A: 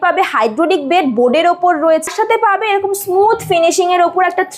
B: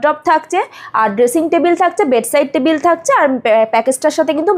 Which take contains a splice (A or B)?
A